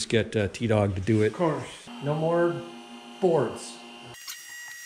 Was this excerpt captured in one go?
yes; 0 cuts

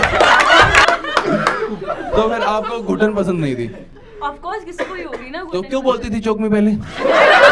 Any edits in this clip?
yes; 2 cuts; at 0.8 s, 2.1 s

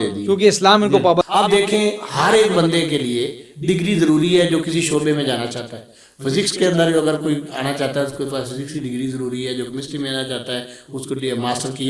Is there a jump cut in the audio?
yes; 1 cut; at 1.2 s

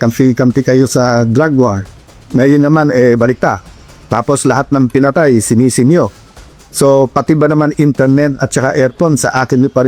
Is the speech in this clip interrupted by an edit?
no; 0 cuts

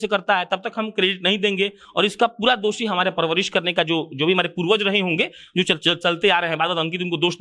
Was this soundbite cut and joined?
no; 0 cuts

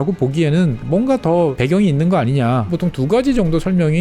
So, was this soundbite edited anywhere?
yes; 3 cuts; at 0.8 s, 1.6 s, 2.7 s

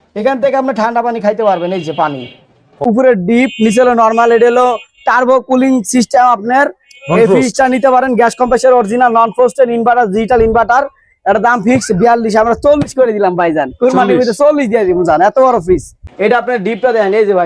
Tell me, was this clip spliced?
yes; 2 cuts; at 2.8 s, 16.0 s

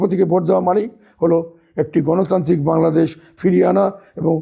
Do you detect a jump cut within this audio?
no; 0 cuts

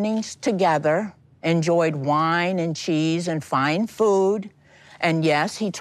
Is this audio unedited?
no; 1 cut; at 4.5 s

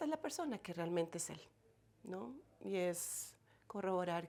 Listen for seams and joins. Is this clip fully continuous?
yes; 0 cuts

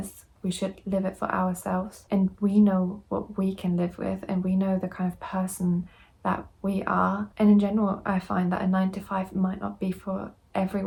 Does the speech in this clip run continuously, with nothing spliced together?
yes; 0 cuts

